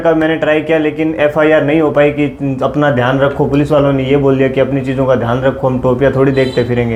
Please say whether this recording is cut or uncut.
uncut